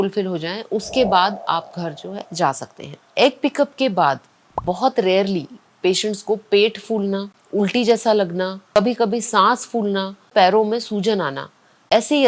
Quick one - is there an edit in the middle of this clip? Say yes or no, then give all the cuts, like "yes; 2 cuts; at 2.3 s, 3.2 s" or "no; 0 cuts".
no; 0 cuts